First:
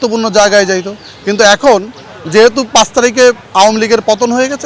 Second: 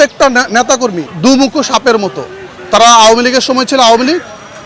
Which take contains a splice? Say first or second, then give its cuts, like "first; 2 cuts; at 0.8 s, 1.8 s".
second; 1 cut; at 1.1 s